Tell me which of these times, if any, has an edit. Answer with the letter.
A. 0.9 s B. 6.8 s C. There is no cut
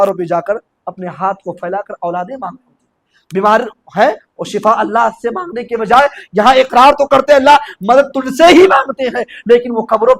C